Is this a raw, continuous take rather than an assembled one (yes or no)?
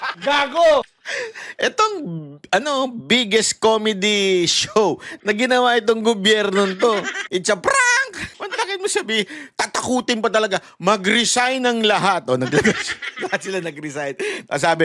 no